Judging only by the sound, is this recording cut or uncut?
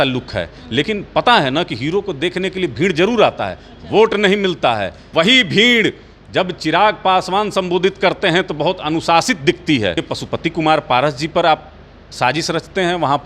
cut